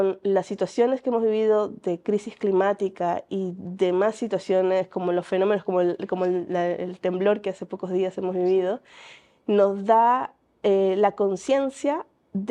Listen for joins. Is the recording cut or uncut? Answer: uncut